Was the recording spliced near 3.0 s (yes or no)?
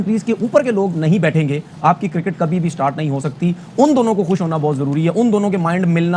no